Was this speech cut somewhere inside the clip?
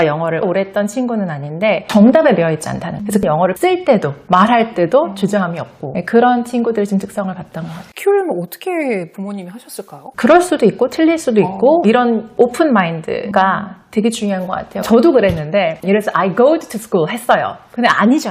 no; 0 cuts

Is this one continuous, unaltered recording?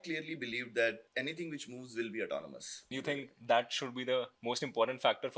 no; 3 cuts; at 1.0 s, 2.9 s, 4.3 s

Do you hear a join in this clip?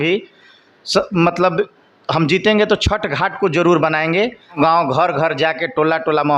yes; 1 cut; at 4.6 s

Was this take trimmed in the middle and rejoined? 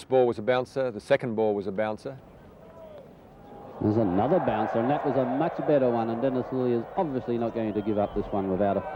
no; 0 cuts

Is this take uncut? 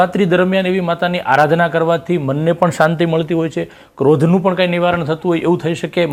yes; 0 cuts

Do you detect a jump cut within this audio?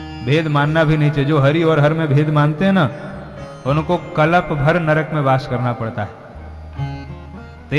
no; 0 cuts

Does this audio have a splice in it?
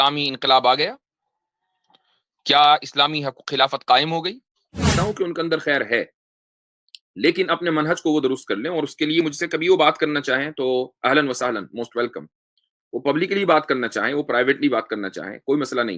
yes; 1 cut; at 4.9 s

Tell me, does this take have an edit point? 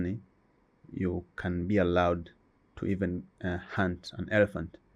no; 0 cuts

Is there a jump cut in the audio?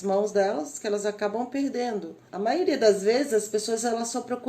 yes; 1 cut; at 2.2 s

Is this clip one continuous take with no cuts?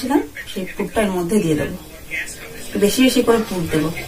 yes; 0 cuts

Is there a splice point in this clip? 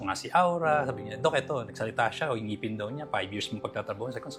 no; 0 cuts

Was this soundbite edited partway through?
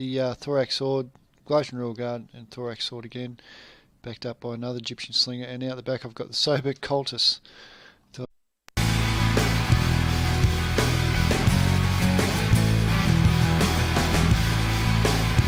no; 0 cuts

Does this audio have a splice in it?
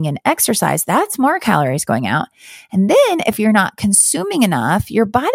no; 0 cuts

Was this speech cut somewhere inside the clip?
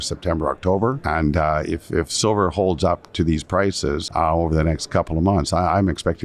yes; 2 cuts; at 1.0 s, 4.0 s

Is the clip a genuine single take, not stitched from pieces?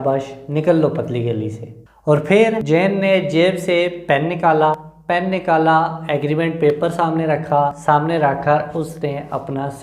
no; 4 cuts; at 1.9 s, 2.6 s, 4.9 s, 7.8 s

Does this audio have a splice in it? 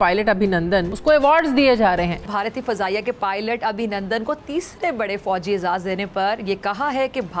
yes; 2 cuts; at 0.9 s, 2.2 s

